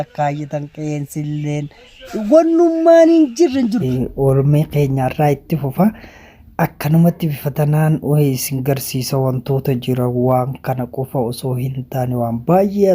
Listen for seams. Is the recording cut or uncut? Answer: cut